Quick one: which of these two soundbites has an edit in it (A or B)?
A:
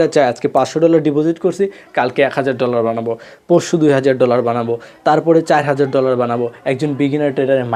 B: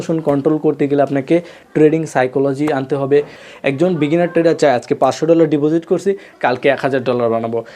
B